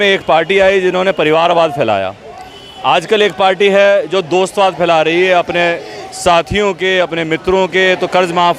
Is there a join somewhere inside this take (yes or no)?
no